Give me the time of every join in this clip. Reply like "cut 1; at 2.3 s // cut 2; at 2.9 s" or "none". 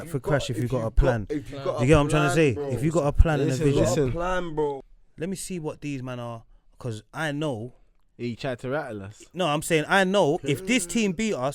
cut 1; at 4.7 s

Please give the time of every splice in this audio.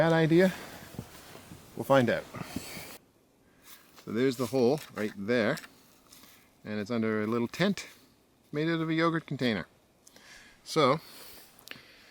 none

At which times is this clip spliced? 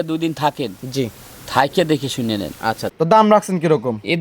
cut 1; at 3.0 s

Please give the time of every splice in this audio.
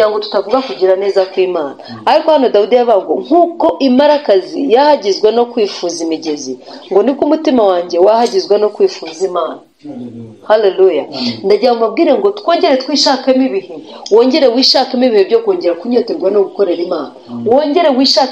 none

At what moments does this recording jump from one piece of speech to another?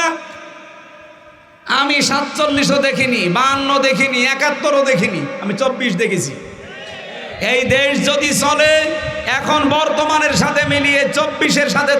none

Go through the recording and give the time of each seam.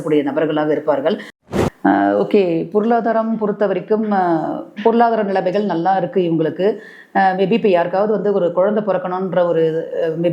cut 1; at 1.4 s

